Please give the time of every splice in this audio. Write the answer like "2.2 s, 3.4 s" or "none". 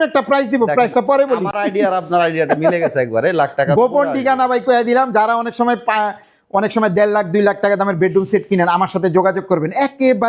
none